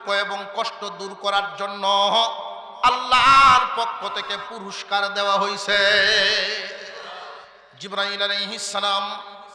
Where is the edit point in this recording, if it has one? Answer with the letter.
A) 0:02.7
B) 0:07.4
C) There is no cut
B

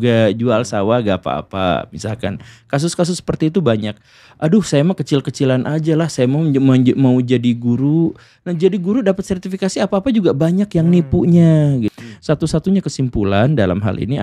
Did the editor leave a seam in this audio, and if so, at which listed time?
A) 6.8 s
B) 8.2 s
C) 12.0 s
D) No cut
C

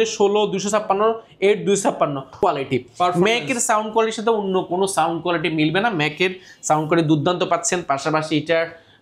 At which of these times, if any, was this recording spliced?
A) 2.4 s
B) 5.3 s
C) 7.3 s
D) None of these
A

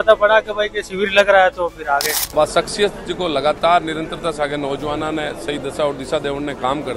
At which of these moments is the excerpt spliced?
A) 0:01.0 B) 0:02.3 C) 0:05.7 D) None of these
B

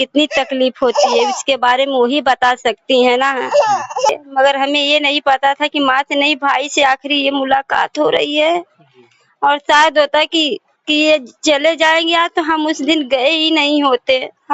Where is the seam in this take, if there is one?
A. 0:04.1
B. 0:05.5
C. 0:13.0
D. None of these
A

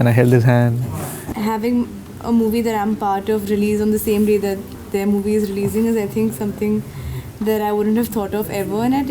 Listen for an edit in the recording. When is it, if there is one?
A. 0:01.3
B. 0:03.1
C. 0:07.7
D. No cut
A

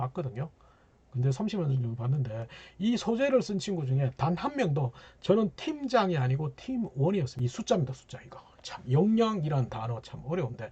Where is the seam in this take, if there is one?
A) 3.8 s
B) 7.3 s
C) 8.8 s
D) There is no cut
B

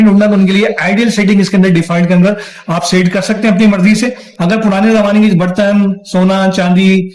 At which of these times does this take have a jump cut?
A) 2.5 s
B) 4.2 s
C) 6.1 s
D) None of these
B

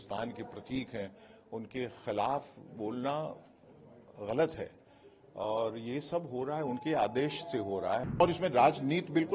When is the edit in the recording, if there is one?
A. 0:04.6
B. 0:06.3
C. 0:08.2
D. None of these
C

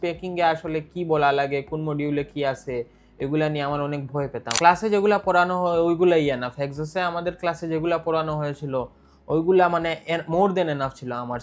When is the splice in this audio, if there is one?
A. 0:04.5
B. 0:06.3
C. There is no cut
A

